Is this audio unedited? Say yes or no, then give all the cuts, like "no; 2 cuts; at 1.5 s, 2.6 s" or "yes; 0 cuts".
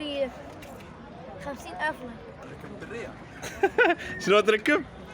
no; 1 cut; at 2.4 s